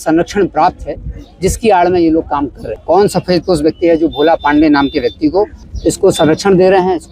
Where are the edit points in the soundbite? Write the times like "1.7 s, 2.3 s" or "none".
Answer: 2.7 s, 5.6 s